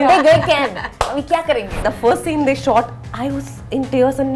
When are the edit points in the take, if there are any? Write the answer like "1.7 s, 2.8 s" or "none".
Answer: 1.8 s